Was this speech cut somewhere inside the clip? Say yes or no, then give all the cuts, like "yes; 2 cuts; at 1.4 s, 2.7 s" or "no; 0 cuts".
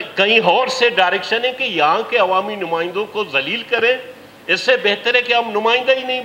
no; 0 cuts